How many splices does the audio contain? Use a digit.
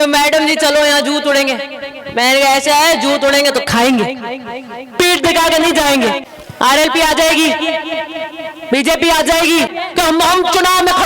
2